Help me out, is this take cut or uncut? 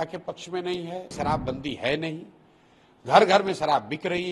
cut